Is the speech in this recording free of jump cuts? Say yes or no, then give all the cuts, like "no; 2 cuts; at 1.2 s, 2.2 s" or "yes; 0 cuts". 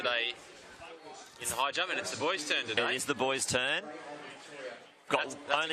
yes; 0 cuts